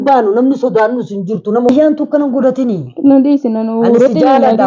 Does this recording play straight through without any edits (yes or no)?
no